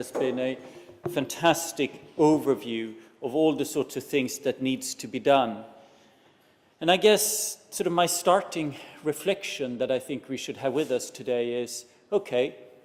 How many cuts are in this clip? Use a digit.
0